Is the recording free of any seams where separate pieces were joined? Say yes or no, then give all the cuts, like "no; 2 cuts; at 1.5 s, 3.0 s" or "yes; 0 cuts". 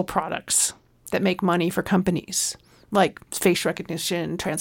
no; 1 cut; at 3.2 s